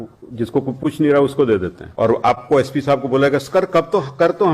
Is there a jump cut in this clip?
yes; 1 cut; at 1.8 s

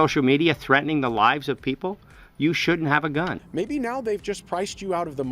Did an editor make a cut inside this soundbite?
yes; 1 cut; at 3.4 s

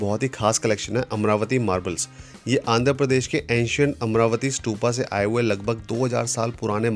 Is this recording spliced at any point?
no; 0 cuts

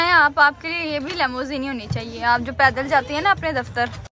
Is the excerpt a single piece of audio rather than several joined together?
yes; 0 cuts

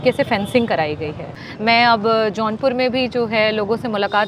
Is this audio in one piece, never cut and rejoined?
no; 1 cut; at 1.5 s

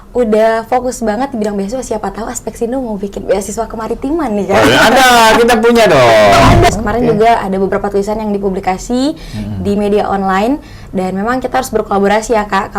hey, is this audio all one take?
no; 1 cut; at 6.7 s

